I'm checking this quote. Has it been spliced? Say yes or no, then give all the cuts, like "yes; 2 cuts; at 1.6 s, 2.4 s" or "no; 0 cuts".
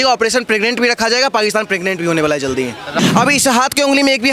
yes; 1 cut; at 2.9 s